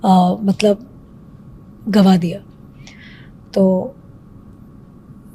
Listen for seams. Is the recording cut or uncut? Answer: uncut